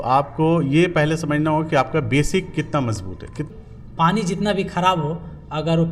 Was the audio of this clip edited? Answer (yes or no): yes